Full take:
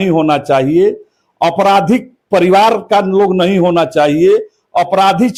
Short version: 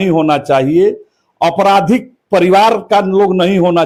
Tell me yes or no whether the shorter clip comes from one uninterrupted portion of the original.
yes